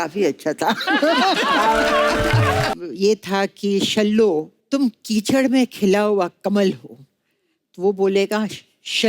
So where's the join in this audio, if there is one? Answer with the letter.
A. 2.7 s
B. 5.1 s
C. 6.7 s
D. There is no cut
A